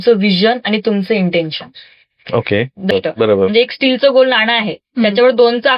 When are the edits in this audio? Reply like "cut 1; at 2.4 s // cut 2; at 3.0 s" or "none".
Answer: cut 1; at 2.9 s